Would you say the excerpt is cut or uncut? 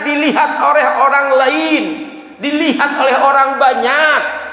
uncut